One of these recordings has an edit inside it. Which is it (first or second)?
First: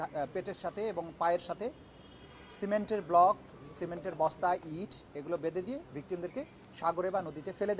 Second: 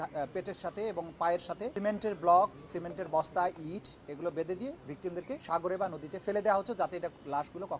second